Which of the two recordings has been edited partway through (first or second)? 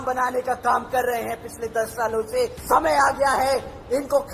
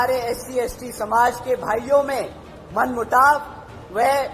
first